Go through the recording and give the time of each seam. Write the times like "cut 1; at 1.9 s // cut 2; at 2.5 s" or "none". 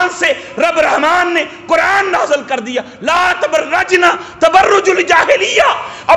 none